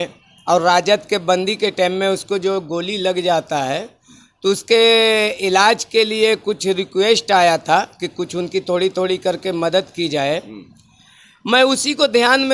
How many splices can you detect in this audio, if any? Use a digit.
0